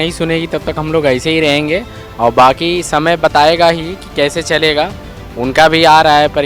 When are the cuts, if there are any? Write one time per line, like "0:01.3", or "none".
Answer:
none

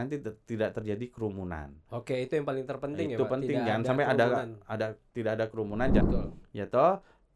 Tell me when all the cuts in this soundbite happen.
0:06.1

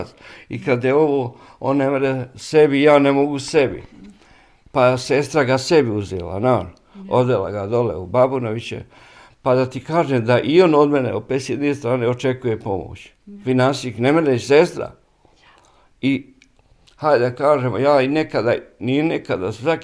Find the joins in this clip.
none

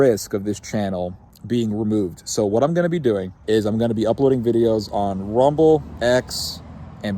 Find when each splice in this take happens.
0:01.3
0:03.3
0:05.9

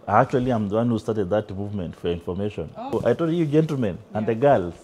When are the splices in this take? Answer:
0:02.8

